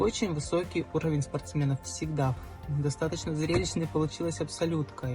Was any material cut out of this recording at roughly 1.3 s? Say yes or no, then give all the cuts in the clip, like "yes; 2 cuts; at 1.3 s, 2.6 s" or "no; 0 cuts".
no; 1 cut; at 2.5 s